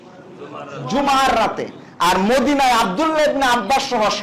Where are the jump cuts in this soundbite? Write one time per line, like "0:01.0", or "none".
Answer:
none